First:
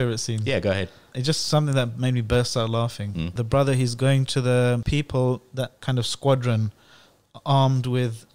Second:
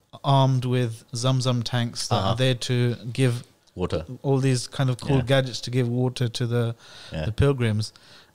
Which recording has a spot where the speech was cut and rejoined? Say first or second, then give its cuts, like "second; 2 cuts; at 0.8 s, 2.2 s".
first; 4 cuts; at 1.1 s, 3.4 s, 4.8 s, 5.8 s